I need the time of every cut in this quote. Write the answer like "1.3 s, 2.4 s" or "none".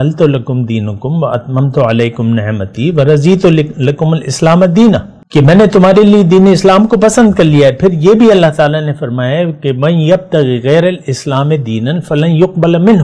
5.2 s